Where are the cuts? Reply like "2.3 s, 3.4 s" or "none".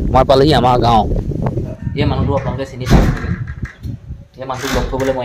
1.7 s